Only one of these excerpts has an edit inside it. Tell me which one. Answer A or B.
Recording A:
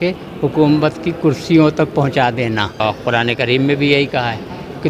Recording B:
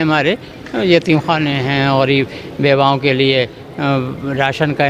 A